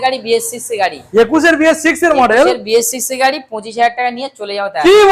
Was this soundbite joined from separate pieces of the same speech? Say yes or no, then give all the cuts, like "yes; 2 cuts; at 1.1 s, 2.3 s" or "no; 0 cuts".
no; 0 cuts